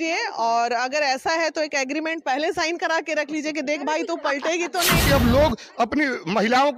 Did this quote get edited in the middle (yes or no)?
yes